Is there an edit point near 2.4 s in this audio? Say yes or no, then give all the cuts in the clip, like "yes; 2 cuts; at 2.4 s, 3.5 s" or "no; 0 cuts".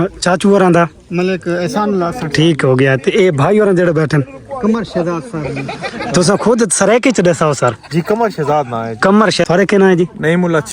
no; 1 cut; at 9.5 s